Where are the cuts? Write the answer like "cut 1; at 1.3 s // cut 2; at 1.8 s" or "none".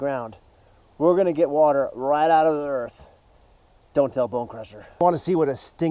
cut 1; at 5.0 s